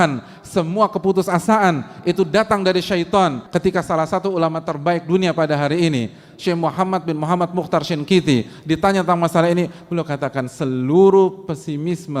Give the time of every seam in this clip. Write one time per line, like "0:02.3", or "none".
0:03.4